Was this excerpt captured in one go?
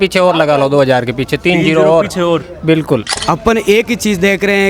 no; 1 cut; at 3.1 s

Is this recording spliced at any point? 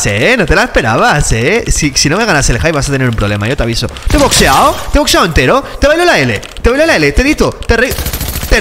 no; 0 cuts

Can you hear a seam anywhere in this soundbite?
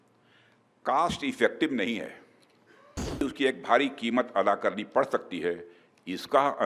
yes; 1 cut; at 3.2 s

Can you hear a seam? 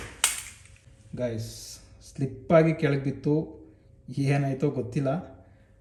no; 0 cuts

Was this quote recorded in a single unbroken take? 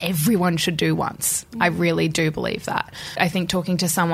no; 1 cut; at 3.2 s

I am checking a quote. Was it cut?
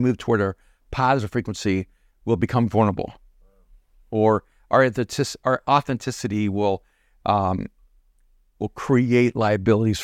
no; 0 cuts

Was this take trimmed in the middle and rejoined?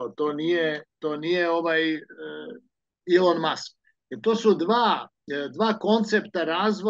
no; 0 cuts

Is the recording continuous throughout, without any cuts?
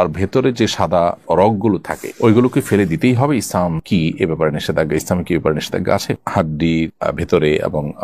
yes; 0 cuts

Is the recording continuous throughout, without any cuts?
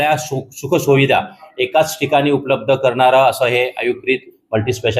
yes; 0 cuts

